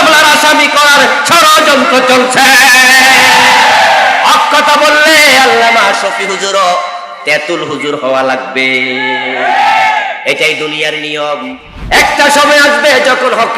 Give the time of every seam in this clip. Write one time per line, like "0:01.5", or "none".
0:11.7